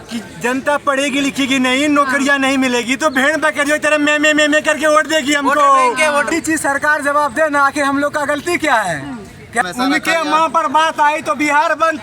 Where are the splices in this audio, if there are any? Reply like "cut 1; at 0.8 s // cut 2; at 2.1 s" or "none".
cut 1; at 6.3 s // cut 2; at 9.6 s

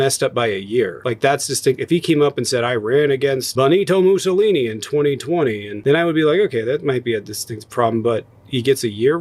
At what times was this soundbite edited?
none

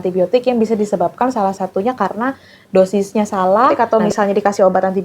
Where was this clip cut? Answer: cut 1; at 3.7 s

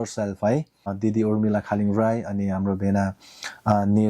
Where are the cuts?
cut 1; at 0.9 s

